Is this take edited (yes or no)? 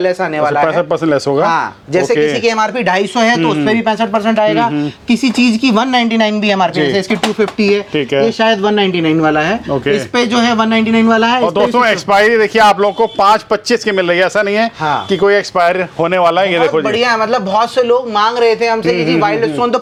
no